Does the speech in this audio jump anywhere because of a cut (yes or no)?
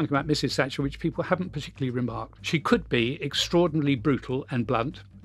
yes